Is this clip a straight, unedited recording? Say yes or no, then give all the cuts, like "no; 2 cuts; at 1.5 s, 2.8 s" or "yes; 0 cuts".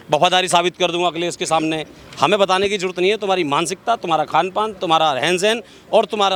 yes; 0 cuts